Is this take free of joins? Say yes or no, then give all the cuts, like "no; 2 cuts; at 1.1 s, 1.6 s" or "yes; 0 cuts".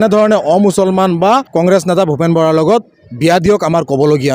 no; 1 cut; at 1.5 s